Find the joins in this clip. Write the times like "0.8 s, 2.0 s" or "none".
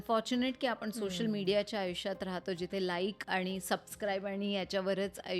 3.2 s